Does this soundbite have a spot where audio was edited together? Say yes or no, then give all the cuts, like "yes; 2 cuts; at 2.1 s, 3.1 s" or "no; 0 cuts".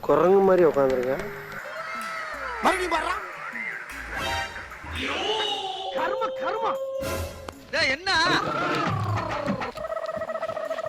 yes; 1 cut; at 8.3 s